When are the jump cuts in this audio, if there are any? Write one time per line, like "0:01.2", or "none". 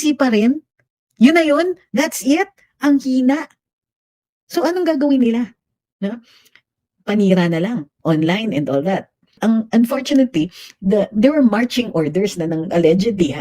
0:09.4

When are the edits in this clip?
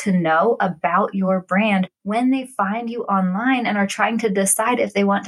none

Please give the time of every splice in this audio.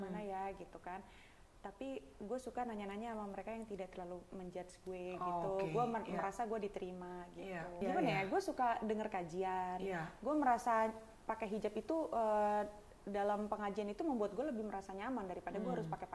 0:07.8

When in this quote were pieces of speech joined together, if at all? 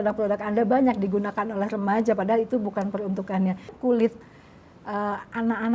0:03.7

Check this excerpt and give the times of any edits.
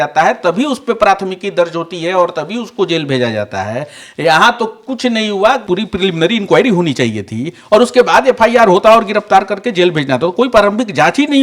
0:05.6

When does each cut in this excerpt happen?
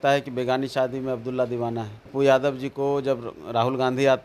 0:02.0

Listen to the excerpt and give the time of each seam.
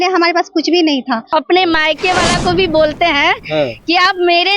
0:01.3

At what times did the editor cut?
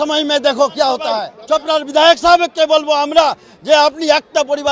0:01.3

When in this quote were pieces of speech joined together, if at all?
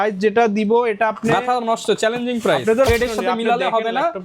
0:02.9

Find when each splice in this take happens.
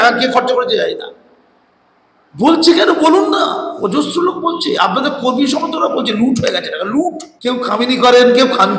0:07.3

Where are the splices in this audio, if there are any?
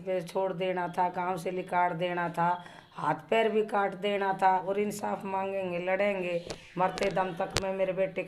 0:04.6

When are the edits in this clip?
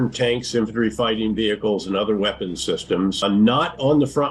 0:03.2

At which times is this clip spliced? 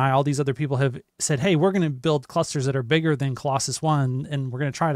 0:01.1

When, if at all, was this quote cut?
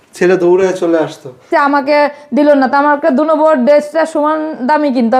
0:01.4

